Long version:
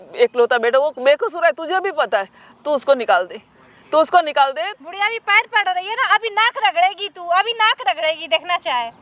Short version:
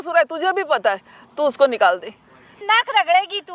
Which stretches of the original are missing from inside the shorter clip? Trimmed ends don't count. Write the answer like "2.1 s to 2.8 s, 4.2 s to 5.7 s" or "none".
3.8 s to 6.2 s